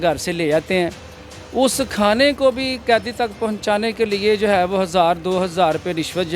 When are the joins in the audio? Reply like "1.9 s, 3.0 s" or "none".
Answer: none